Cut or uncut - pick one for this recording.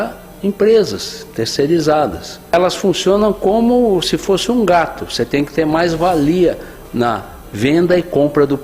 cut